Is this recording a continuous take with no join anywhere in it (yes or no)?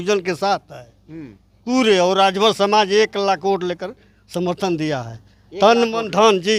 yes